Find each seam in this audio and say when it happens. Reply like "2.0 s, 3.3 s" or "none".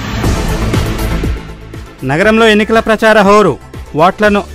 none